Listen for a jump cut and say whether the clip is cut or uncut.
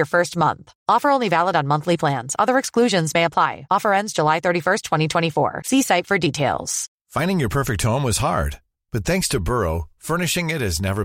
uncut